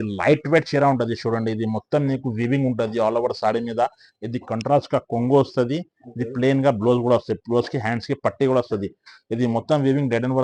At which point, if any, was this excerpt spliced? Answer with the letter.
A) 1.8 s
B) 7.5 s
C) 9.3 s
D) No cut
D